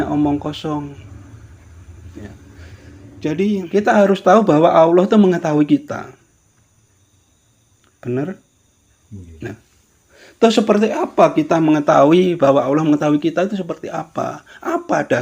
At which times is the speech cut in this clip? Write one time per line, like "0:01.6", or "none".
0:03.7